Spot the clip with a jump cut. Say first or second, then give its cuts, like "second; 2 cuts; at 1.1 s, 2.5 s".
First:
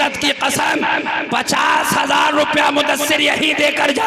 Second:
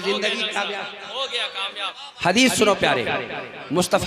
second; 1 cut; at 2.0 s